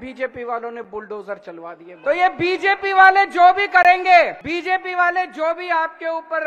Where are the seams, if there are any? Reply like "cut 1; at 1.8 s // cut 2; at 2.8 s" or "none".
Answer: cut 1; at 1.9 s // cut 2; at 4.4 s